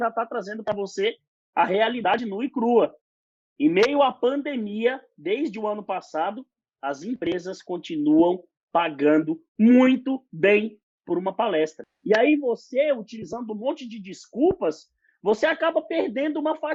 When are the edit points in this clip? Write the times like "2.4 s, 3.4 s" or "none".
none